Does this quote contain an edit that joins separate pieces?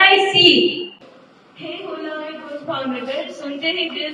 no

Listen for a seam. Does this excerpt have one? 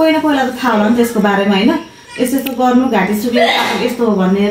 no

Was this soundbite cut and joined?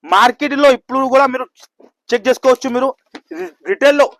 no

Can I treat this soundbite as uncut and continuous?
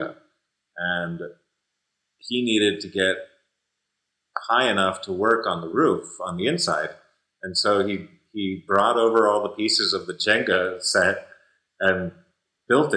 yes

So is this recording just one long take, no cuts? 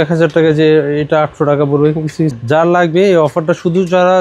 no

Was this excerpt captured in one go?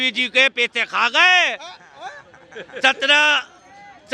yes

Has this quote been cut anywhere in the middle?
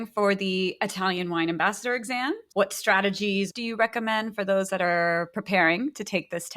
yes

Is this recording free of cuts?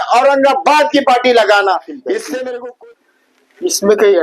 no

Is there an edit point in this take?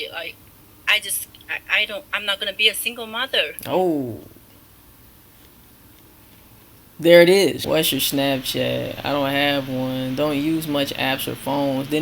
yes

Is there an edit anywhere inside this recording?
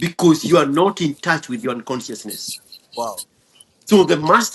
no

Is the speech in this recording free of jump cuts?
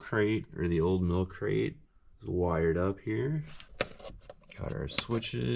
no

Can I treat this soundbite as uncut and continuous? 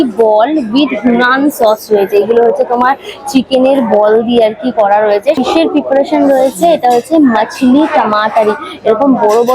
no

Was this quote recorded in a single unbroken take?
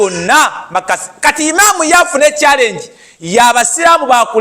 yes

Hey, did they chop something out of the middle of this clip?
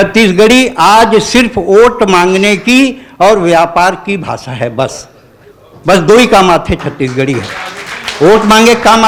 no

